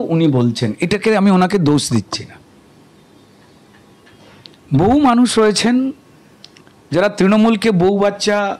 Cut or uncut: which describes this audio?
uncut